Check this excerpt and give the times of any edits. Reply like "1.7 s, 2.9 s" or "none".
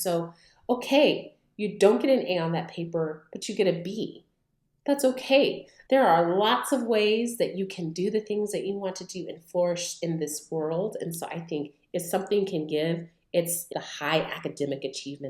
5.7 s, 13.7 s